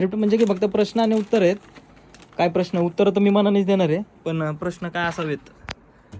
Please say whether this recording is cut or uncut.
uncut